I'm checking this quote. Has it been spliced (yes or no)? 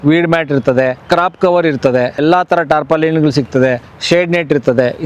yes